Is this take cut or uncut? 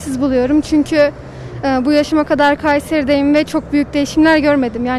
uncut